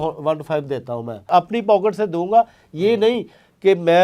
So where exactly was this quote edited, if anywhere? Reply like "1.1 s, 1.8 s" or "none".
1.3 s